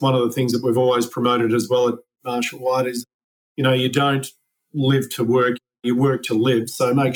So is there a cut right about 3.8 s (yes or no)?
no